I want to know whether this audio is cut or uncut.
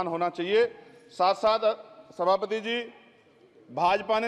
uncut